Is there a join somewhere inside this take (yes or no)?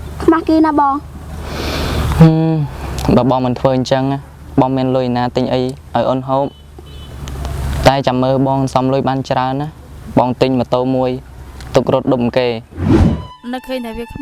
yes